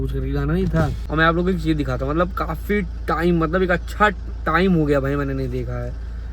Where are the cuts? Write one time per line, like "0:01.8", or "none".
0:01.0